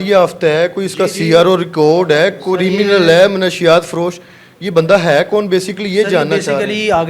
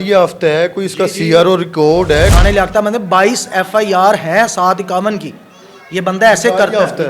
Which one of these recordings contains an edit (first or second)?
second